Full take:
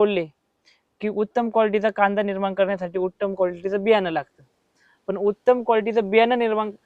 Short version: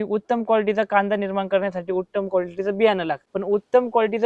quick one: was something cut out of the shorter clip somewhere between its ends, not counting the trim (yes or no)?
yes